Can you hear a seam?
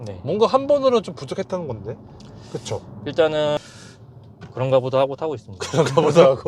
yes; 1 cut; at 3.6 s

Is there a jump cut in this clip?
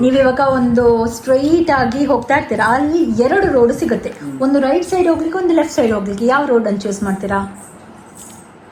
no; 0 cuts

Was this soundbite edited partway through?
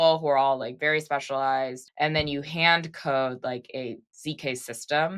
yes; 1 cut; at 1.8 s

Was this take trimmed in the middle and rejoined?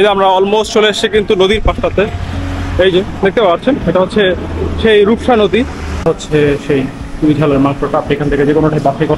yes; 1 cut; at 6.0 s

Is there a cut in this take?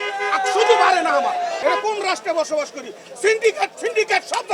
yes; 1 cut; at 1.6 s

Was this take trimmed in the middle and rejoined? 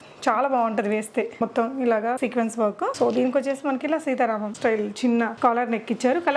yes; 4 cuts; at 1.4 s, 2.5 s, 4.5 s, 5.3 s

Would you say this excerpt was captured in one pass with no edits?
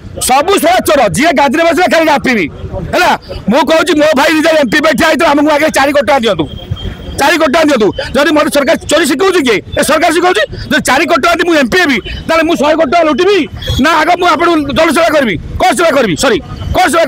yes; 0 cuts

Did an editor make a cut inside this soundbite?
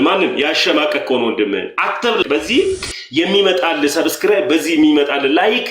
yes; 1 cut; at 2.3 s

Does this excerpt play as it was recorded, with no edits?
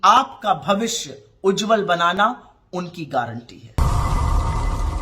no; 1 cut; at 3.8 s

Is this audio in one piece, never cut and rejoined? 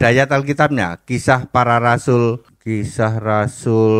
no; 1 cut; at 2.5 s

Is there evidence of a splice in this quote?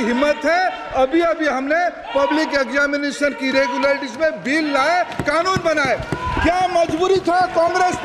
no; 0 cuts

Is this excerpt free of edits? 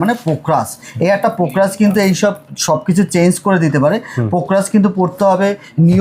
yes; 0 cuts

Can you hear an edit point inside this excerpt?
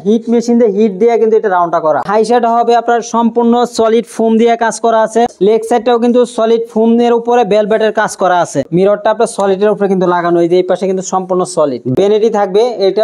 yes; 4 cuts; at 2.0 s, 5.3 s, 8.7 s, 12.0 s

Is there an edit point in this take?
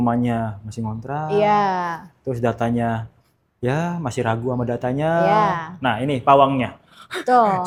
no; 0 cuts

